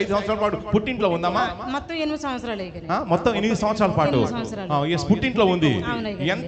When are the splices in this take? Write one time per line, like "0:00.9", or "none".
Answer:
none